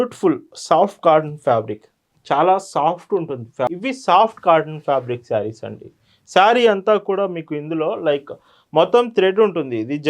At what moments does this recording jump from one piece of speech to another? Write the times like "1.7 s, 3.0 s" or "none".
3.7 s